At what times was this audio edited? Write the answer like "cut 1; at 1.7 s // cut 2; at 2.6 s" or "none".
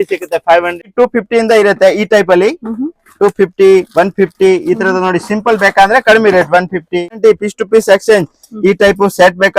cut 1; at 0.8 s // cut 2; at 7.2 s